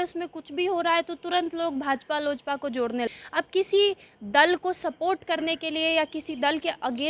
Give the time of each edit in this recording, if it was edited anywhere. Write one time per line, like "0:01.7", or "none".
0:03.1